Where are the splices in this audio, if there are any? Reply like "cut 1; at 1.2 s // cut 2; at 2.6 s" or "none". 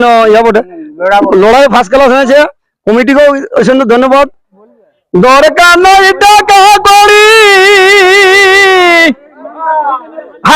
cut 1; at 4.5 s